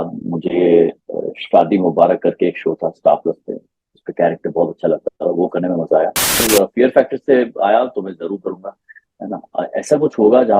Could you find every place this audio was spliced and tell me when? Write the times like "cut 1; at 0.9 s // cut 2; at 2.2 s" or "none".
cut 1; at 6.5 s